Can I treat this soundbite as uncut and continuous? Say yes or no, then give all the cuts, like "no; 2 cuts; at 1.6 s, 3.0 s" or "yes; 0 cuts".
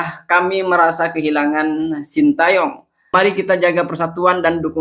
no; 1 cut; at 3.1 s